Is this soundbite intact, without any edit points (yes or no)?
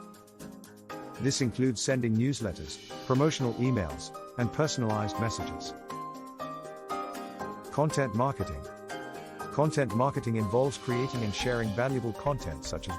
no